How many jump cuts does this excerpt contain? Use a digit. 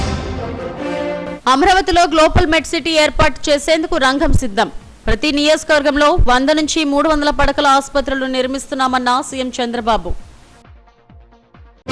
1